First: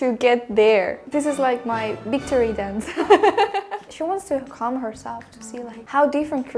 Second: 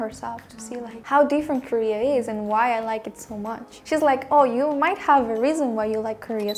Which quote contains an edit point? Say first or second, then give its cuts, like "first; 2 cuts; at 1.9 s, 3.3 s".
first; 1 cut; at 3.8 s